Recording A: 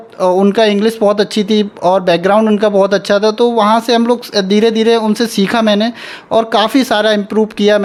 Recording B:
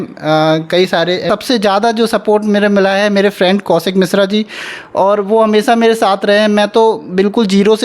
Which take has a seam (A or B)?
B